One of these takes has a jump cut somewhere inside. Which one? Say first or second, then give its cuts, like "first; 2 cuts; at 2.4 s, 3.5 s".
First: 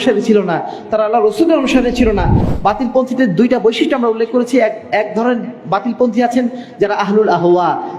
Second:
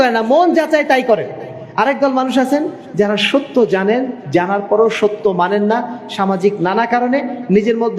first; 1 cut; at 2.4 s